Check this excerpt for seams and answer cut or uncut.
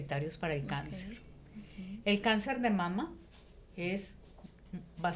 uncut